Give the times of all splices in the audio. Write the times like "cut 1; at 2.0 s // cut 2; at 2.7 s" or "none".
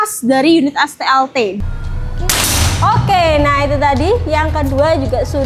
cut 1; at 1.6 s

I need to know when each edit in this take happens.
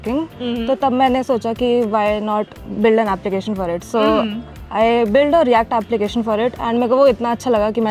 none

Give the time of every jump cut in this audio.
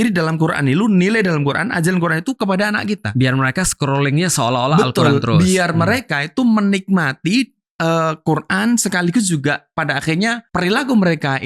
cut 1; at 10.4 s

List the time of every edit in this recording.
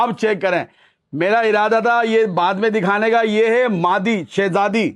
none

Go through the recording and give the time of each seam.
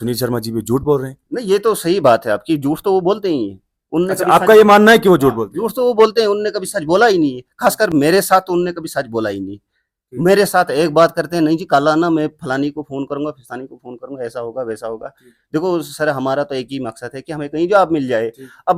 none

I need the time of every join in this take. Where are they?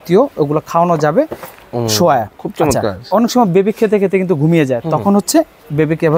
none

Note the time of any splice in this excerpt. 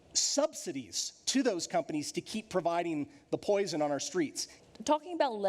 cut 1; at 4.5 s

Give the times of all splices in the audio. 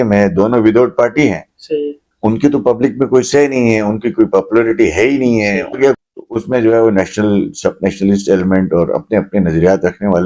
cut 1; at 5.7 s

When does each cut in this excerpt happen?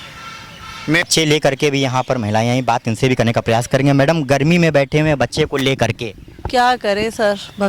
cut 1; at 1.0 s

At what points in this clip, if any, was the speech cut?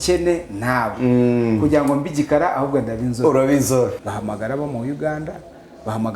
cut 1; at 4.1 s

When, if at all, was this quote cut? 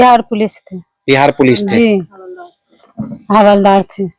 none

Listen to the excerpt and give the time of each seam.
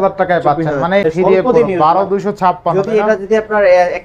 cut 1; at 1.0 s

